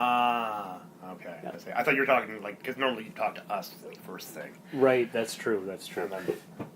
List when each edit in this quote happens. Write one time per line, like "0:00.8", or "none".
none